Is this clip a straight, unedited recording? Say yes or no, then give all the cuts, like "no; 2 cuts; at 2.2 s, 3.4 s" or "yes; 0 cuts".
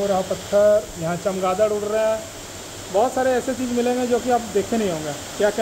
yes; 0 cuts